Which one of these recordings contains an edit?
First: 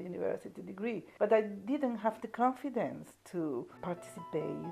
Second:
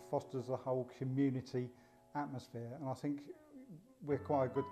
first; 2 cuts; at 1.1 s, 3.8 s

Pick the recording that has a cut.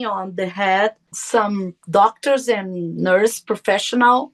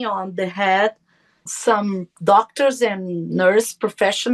first; 1 cut; at 1.1 s

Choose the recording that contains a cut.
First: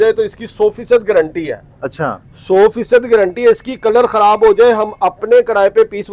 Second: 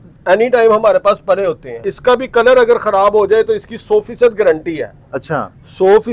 second; 1 cut; at 1.9 s

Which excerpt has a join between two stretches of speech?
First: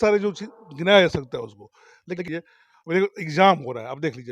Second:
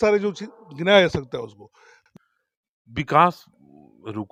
first; 1 cut; at 2.3 s

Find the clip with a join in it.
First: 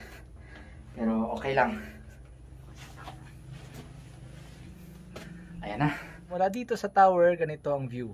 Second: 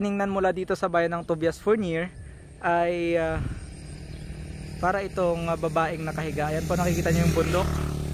first; 1 cut; at 6.3 s

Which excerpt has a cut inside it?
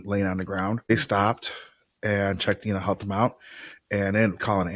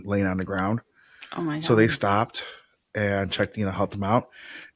first; 1 cut; at 0.9 s

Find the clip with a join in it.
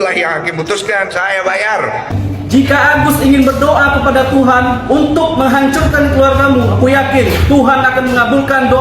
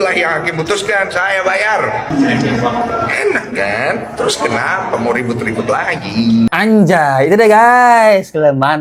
first; 1 cut; at 2.1 s

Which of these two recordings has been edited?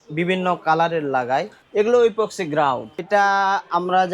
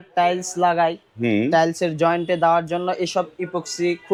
first; 2 cuts; at 1.6 s, 3.0 s

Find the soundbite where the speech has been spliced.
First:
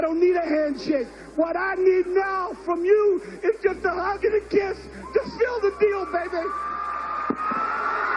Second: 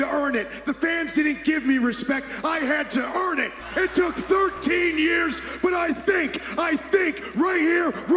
second; 1 cut; at 3.6 s

